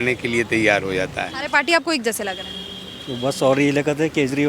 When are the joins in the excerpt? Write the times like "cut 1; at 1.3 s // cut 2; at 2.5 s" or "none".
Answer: cut 1; at 1.4 s